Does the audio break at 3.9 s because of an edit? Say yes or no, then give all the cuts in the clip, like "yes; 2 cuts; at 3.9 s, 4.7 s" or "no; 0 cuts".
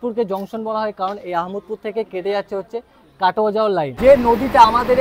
yes; 1 cut; at 3.9 s